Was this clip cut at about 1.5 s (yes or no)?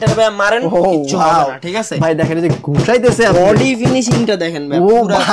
no